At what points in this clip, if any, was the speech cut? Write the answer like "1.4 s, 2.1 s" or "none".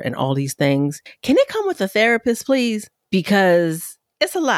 1.1 s, 2.9 s